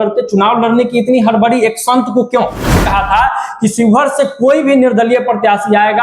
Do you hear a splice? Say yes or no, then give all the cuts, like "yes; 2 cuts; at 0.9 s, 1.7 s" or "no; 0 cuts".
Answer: yes; 1 cut; at 2.8 s